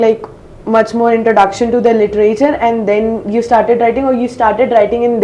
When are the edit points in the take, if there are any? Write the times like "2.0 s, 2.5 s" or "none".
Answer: none